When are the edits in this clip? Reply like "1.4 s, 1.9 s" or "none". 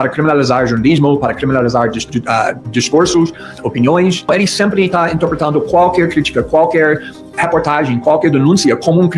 4.3 s